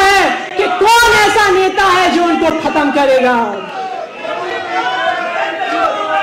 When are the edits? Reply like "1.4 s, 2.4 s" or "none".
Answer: none